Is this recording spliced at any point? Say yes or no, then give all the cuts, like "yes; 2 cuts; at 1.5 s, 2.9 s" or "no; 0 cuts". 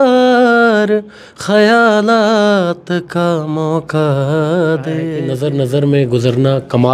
yes; 1 cut; at 5.1 s